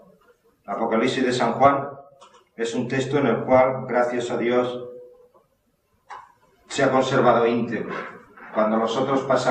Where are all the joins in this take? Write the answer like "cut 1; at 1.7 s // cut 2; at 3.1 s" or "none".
cut 1; at 7.3 s